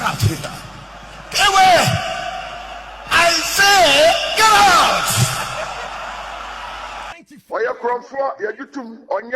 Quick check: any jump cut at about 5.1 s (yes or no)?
no